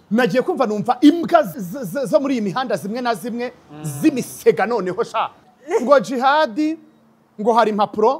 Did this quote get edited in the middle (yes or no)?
yes